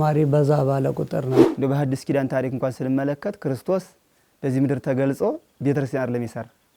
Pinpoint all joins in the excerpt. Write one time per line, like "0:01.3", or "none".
0:01.4

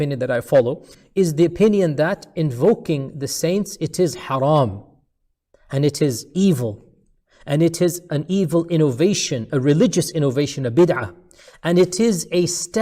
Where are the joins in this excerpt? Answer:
0:00.9

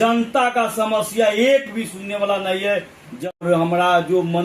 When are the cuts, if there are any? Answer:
0:03.4

